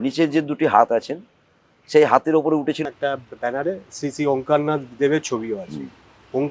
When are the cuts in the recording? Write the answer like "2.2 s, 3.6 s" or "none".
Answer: 2.9 s